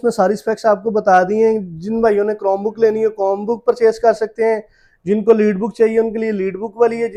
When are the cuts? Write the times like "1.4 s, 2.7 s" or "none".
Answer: none